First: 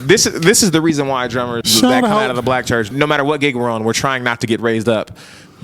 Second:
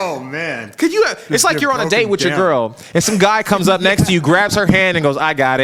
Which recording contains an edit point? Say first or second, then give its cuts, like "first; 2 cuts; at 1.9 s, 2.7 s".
first; 2 cuts; at 1.6 s, 2.9 s